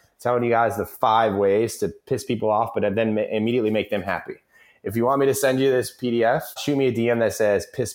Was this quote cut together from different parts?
yes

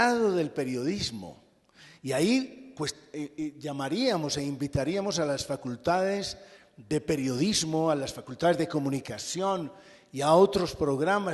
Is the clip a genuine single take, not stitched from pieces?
yes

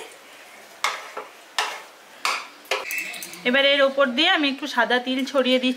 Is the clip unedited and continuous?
no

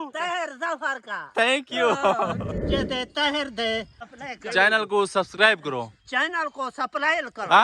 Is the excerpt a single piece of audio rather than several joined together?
no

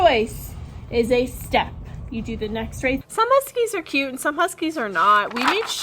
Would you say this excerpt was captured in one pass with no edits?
no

